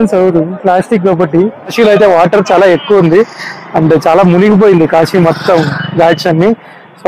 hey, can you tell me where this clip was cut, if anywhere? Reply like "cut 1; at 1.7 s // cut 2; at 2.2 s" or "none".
cut 1; at 1.7 s